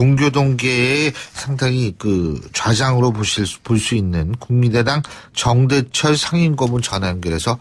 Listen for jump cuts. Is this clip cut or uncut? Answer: cut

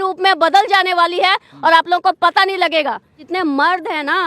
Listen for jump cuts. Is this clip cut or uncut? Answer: cut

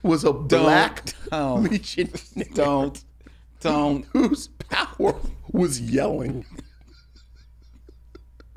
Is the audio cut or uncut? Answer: uncut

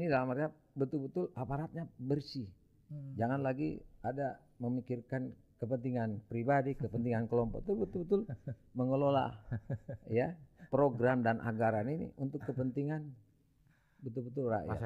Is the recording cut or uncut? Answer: uncut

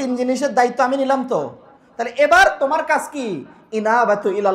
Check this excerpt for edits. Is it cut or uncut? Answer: uncut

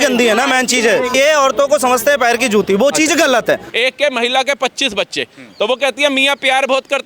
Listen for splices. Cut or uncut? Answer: cut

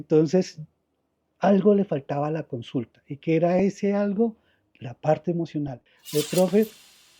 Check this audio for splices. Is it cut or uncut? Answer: cut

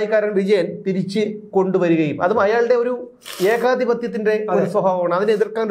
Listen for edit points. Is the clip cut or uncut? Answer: uncut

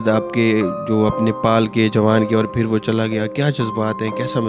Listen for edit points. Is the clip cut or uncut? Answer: uncut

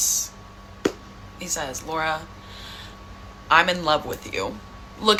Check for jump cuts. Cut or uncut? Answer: uncut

